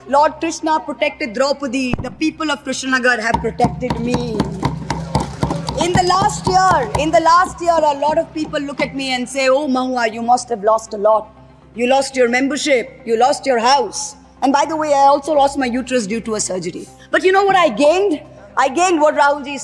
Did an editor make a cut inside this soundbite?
no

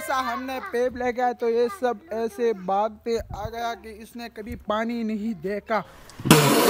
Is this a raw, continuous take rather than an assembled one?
yes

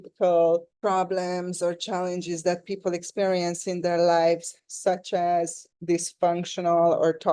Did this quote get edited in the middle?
yes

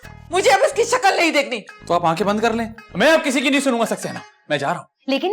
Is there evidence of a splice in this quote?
yes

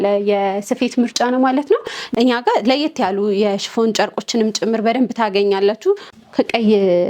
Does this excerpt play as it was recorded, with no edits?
no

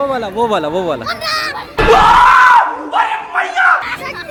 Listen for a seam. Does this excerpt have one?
no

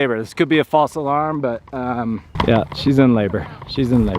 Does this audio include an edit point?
yes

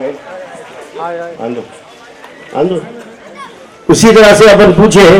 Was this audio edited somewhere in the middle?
no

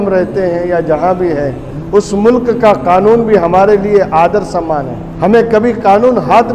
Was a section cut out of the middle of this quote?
yes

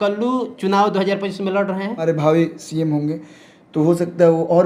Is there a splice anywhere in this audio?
yes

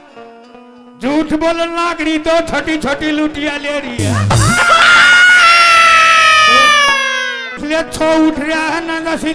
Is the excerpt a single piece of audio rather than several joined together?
no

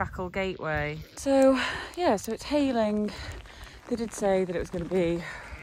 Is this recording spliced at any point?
yes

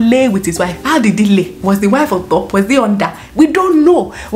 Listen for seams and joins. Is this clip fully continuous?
yes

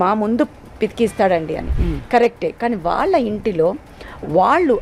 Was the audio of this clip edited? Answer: no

